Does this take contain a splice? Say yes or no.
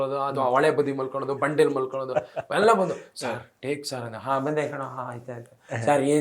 no